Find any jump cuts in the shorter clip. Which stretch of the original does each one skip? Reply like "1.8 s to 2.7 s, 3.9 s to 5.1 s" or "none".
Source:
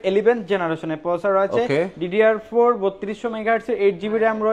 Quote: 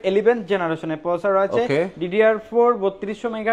none